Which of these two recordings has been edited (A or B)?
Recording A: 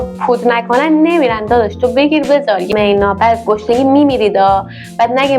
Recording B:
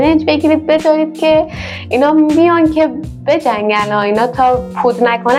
A